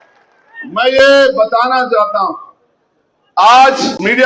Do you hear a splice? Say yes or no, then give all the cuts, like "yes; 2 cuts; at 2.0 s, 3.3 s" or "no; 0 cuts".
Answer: no; 0 cuts